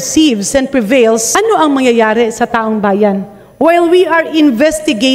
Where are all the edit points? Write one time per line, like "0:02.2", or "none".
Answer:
0:01.3